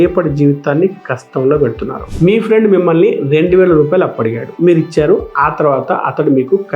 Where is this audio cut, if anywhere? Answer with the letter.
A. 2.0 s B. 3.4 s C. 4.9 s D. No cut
A